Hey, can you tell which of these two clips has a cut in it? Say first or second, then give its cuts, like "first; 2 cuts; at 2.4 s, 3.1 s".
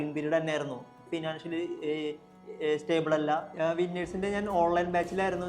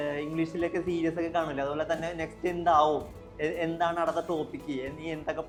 first; 2 cuts; at 1.0 s, 3.5 s